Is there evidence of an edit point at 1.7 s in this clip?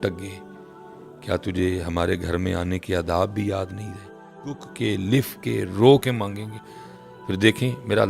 no; 1 cut; at 4.7 s

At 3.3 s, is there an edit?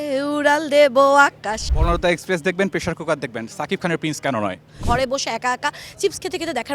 no; 2 cuts; at 1.5 s, 4.7 s

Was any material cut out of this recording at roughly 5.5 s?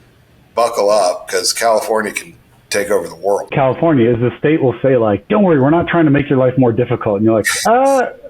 no; 1 cut; at 3.5 s

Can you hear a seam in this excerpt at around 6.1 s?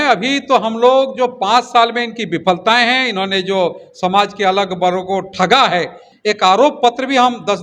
yes; 1 cut; at 6.1 s

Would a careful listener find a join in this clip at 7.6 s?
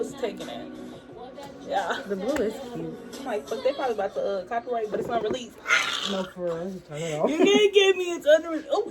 no; 1 cut; at 3.2 s

